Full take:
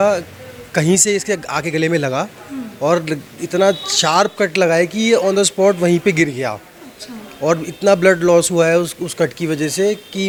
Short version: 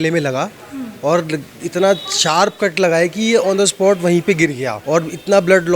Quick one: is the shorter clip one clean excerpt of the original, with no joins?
no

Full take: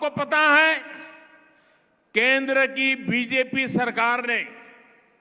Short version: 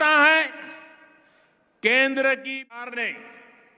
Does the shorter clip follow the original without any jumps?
no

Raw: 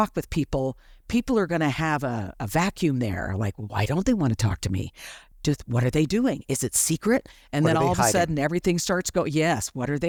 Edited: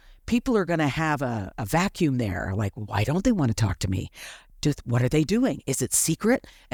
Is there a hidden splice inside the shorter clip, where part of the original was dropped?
no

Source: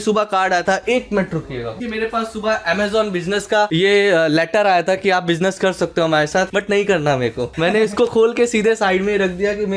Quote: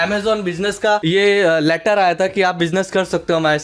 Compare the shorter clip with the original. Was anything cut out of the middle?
no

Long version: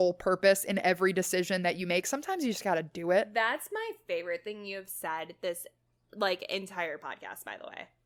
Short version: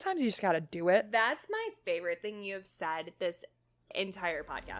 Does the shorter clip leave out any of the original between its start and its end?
yes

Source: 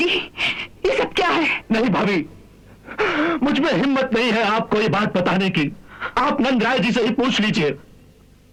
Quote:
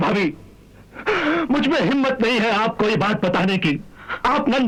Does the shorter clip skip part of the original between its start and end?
no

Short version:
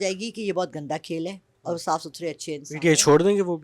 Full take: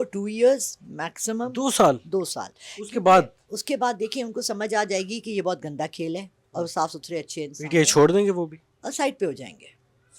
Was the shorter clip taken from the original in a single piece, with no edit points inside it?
yes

